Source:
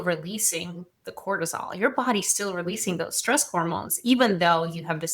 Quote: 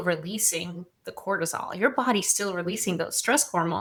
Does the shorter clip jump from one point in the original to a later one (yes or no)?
no